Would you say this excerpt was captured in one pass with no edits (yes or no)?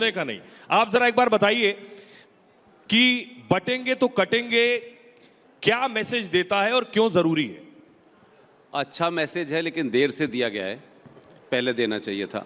yes